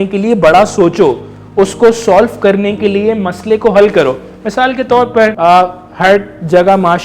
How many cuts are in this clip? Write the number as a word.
one